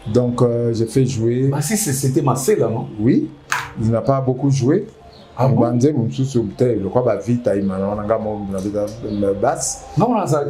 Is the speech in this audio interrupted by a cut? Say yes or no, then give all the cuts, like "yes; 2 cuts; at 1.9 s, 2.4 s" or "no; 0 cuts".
no; 0 cuts